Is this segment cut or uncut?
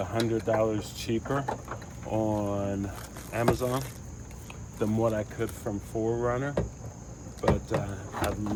uncut